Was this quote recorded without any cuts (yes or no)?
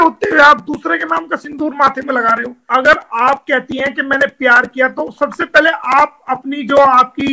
no